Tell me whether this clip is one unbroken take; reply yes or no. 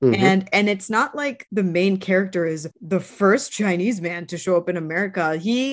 no